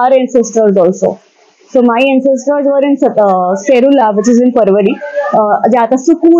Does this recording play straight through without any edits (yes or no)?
yes